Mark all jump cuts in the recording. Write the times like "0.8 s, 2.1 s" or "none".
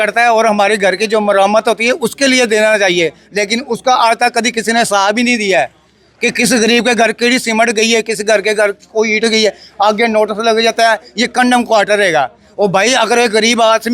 none